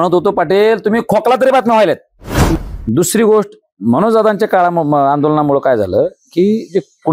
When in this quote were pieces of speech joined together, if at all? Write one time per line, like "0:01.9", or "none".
0:02.5